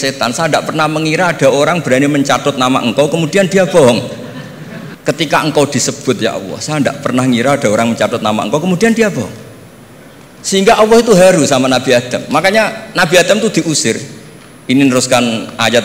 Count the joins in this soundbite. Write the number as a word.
zero